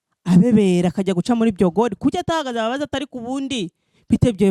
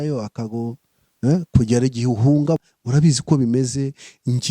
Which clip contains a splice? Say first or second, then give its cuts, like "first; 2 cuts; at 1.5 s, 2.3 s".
second; 1 cut; at 2.6 s